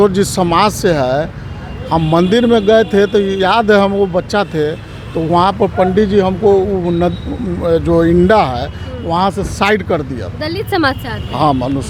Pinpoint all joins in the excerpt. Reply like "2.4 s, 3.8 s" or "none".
none